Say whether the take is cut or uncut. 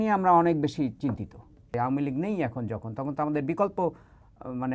cut